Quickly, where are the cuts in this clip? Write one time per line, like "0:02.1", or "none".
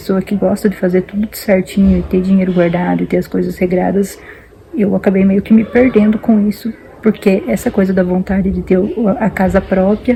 none